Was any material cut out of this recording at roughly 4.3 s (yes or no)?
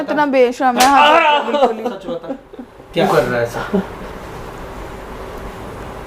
no